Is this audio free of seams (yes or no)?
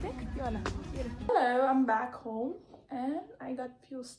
no